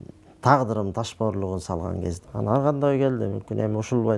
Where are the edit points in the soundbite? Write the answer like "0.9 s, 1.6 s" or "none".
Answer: 2.2 s